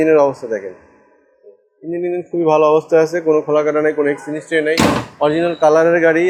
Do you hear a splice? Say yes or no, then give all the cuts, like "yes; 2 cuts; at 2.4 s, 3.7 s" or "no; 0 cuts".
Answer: no; 0 cuts